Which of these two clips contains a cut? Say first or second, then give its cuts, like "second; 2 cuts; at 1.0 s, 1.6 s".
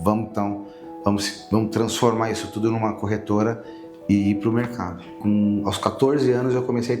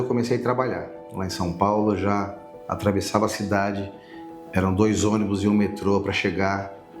first; 1 cut; at 5.2 s